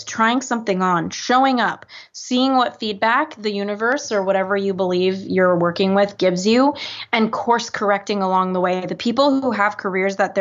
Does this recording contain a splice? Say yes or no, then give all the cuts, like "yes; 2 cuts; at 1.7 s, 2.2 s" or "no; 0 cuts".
no; 0 cuts